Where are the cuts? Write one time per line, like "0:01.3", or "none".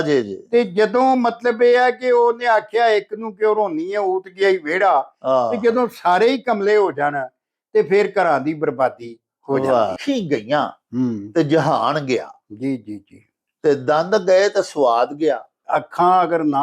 0:10.0
0:15.6